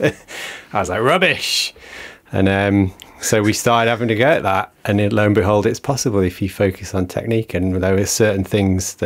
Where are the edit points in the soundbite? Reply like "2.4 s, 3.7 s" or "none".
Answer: none